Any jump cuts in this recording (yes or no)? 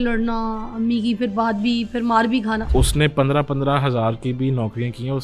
yes